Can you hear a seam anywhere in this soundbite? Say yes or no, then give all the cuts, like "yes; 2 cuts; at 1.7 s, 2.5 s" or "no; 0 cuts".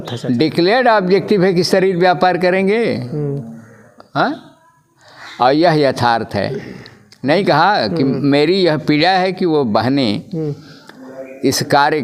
no; 0 cuts